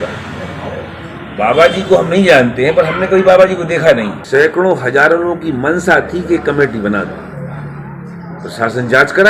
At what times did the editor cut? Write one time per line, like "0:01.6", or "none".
0:04.2